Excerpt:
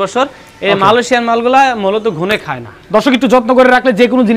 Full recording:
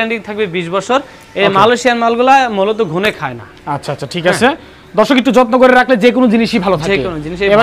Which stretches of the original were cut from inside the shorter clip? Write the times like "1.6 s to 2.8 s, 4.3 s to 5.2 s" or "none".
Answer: 3.4 s to 4.7 s

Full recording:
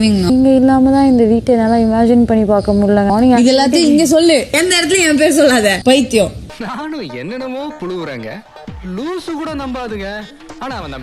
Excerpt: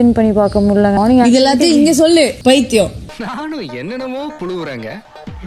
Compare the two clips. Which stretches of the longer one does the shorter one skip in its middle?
4.5 s to 5.8 s

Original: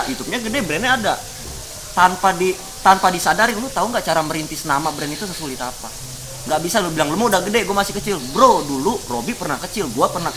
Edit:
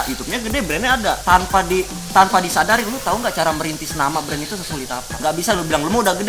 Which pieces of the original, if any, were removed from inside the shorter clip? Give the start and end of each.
1.2 s to 1.9 s, 5.8 s to 6.4 s

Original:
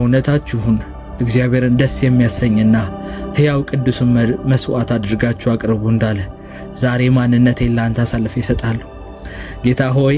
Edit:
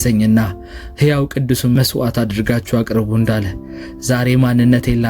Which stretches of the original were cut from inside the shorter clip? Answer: 4.1 s to 4.5 s

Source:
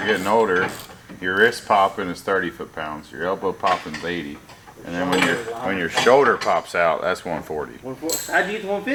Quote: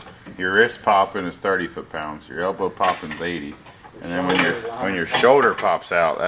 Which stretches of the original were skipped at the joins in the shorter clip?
none

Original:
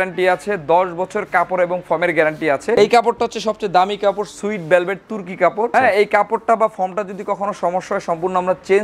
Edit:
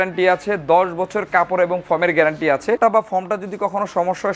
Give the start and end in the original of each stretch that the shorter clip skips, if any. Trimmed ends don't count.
2.8 s to 6.4 s

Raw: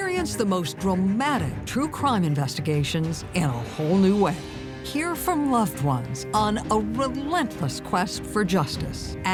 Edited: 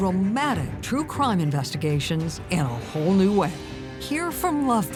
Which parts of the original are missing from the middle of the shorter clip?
none

